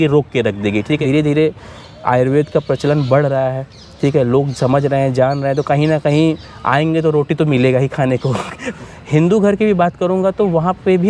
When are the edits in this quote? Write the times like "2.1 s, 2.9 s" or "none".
1.0 s, 8.7 s